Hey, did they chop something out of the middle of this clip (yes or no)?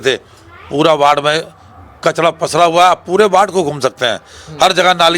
no